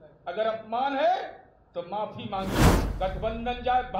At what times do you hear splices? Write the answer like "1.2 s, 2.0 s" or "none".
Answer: 2.8 s